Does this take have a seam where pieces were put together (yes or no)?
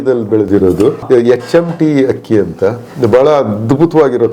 yes